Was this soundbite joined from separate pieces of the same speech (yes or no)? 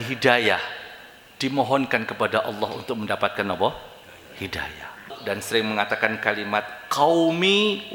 yes